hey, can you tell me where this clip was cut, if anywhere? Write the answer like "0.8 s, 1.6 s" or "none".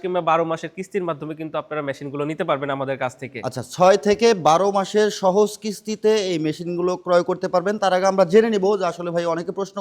none